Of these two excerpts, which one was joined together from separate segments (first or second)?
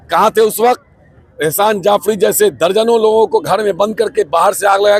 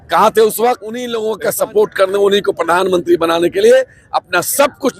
second